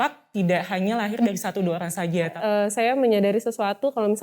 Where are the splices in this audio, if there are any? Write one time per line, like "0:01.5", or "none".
0:02.4